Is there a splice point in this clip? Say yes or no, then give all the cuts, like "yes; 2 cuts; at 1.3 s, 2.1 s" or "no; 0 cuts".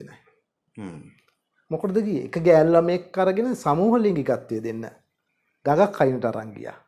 no; 0 cuts